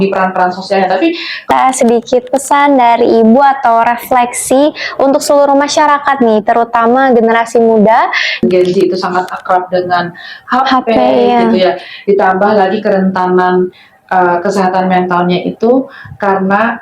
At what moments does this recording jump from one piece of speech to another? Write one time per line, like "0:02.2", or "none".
0:01.5
0:08.4